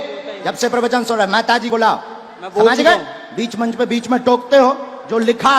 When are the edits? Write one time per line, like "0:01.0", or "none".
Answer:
0:01.7

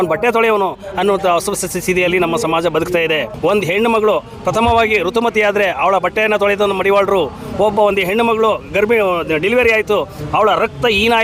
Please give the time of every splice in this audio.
0:03.3

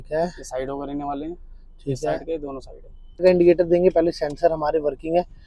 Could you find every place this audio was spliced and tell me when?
0:03.2

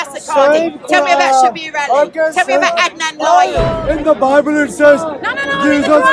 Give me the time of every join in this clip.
0:03.7

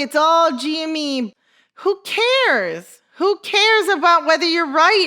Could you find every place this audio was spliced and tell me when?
0:01.3

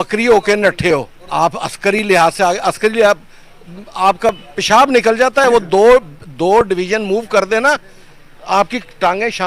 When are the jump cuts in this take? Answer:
0:01.2

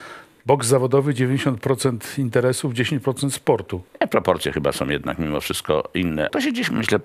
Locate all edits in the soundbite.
0:03.8
0:06.3

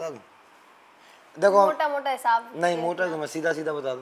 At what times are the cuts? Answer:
none

